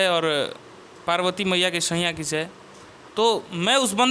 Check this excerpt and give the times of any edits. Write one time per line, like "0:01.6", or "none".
none